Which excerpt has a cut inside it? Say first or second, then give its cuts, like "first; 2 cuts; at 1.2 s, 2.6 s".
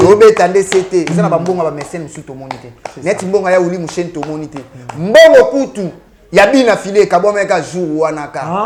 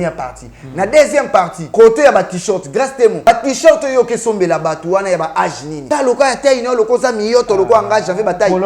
second; 3 cuts; at 1.6 s, 3.3 s, 5.7 s